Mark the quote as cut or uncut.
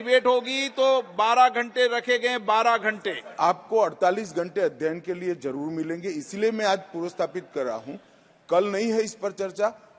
cut